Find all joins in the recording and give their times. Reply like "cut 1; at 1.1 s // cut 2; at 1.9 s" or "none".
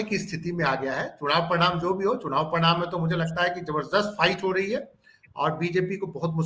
none